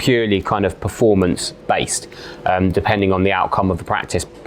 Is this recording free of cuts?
yes; 0 cuts

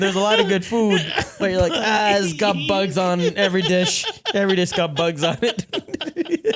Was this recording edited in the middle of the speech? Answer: no; 0 cuts

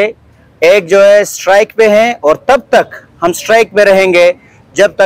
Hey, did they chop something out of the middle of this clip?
no; 0 cuts

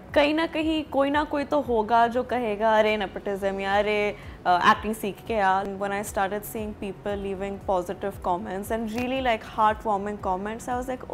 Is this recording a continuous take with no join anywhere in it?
no; 1 cut; at 5.6 s

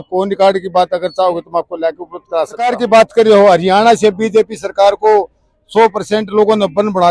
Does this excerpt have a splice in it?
yes; 1 cut; at 2.7 s

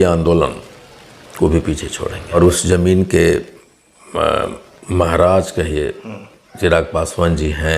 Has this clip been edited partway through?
yes; 1 cut; at 2.3 s

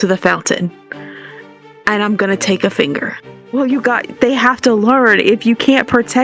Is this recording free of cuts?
no; 1 cut; at 3.3 s

